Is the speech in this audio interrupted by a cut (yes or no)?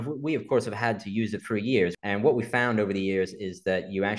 yes